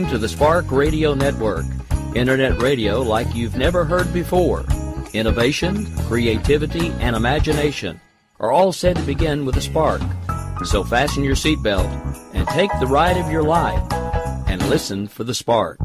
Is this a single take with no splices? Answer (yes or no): yes